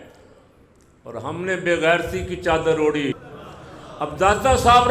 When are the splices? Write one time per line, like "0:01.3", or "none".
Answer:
0:03.2